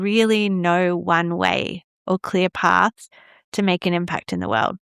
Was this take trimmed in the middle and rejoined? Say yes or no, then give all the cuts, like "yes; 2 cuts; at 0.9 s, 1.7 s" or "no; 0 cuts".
no; 0 cuts